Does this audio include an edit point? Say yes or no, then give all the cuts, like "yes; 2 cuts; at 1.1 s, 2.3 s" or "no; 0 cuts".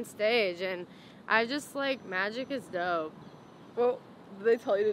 no; 0 cuts